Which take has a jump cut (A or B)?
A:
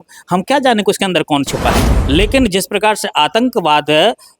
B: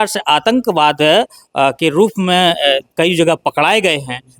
A